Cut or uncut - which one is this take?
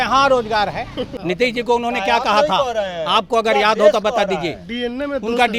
cut